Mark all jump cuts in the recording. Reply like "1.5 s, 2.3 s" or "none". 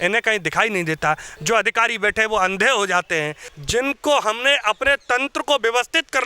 3.4 s